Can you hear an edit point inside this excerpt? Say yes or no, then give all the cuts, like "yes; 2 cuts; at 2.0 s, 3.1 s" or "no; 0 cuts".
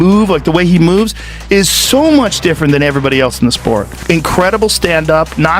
yes; 1 cut; at 1.2 s